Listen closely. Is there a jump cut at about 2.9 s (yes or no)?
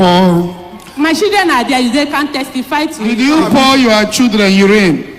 yes